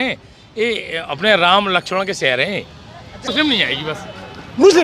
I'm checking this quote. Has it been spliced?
yes; 1 cut; at 3.3 s

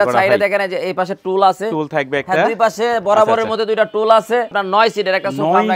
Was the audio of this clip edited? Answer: yes; 1 cut; at 4.6 s

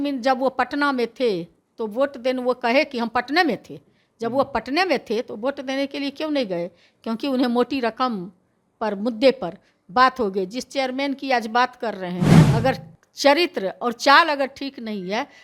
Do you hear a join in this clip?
yes; 1 cut; at 12.4 s

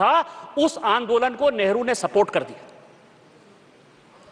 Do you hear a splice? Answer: no; 0 cuts

